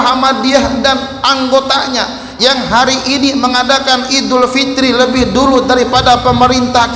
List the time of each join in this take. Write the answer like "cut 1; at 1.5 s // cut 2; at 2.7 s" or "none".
none